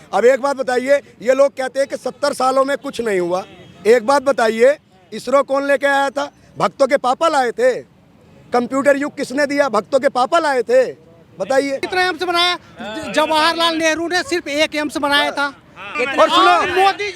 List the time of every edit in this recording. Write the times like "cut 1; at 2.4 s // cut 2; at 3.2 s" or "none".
cut 1; at 11.8 s // cut 2; at 15.8 s